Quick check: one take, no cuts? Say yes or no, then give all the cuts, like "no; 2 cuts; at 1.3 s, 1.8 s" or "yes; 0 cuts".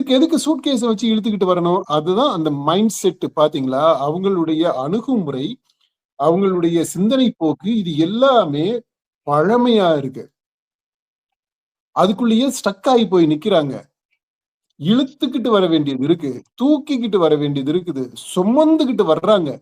yes; 0 cuts